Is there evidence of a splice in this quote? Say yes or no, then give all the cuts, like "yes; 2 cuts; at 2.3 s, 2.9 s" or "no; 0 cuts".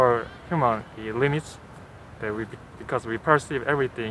no; 0 cuts